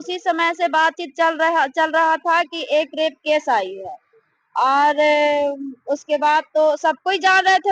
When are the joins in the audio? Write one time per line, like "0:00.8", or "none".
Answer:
none